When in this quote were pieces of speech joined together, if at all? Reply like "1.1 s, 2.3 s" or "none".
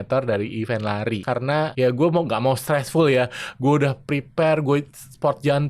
1.3 s